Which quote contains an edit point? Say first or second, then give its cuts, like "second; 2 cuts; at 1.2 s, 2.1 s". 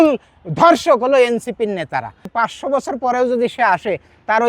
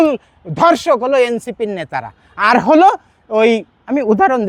first; 1 cut; at 2.3 s